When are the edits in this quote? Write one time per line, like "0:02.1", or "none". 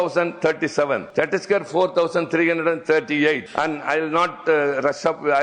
0:01.1
0:03.5